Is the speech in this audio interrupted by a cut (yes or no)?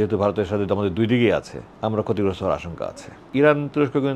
yes